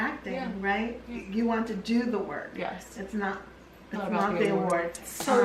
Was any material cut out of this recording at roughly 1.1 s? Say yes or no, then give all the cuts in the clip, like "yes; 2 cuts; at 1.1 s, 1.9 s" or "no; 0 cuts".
yes; 1 cut; at 1.1 s